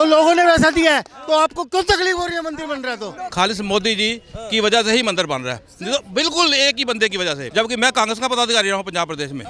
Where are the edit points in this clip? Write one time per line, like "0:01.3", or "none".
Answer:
0:03.2
0:07.4